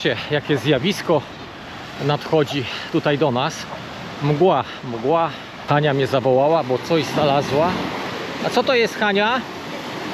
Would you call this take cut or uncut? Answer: cut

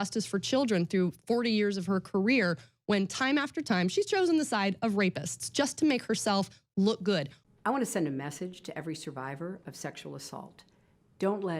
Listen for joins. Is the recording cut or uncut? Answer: cut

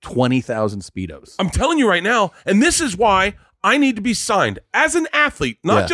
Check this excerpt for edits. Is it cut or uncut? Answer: uncut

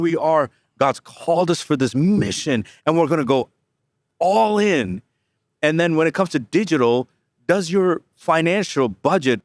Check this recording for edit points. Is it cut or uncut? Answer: uncut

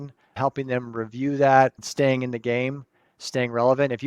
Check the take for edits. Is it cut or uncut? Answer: cut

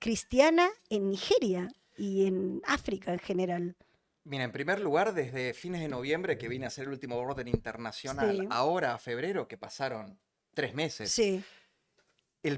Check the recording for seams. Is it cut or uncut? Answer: uncut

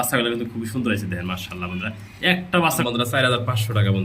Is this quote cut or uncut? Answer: cut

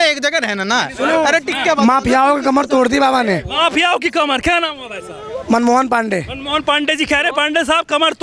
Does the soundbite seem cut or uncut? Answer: uncut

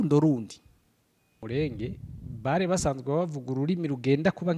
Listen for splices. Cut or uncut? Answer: cut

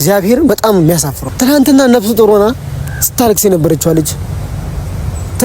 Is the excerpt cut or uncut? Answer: cut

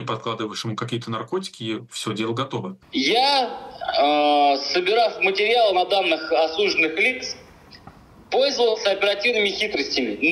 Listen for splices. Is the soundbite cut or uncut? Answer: cut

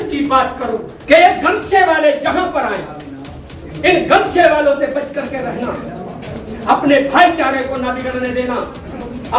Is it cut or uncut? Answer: cut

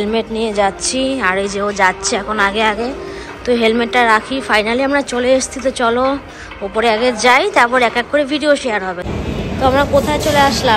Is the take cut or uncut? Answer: cut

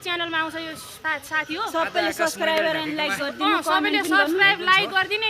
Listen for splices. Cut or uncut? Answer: cut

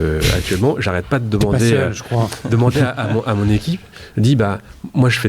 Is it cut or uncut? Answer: uncut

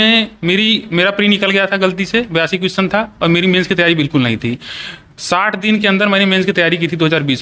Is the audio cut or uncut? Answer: uncut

